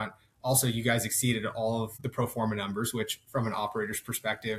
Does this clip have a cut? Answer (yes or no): no